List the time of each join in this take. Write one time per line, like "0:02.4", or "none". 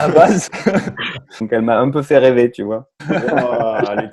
0:01.4
0:02.9